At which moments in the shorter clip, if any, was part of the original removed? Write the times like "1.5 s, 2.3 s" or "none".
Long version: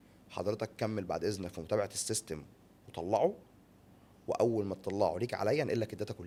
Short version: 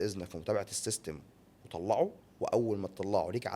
2.2 s